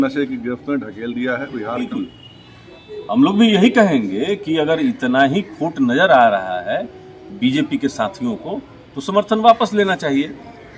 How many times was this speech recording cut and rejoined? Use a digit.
1